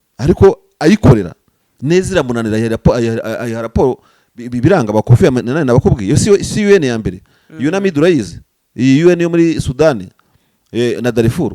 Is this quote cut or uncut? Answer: uncut